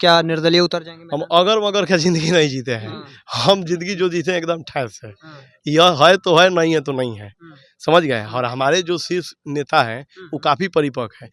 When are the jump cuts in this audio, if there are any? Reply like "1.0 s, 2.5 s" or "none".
none